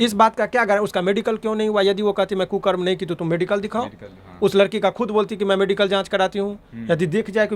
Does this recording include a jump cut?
no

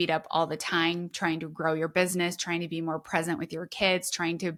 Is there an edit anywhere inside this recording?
no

